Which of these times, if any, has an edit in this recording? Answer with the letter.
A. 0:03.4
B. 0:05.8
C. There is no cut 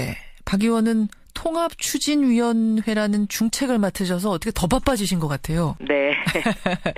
B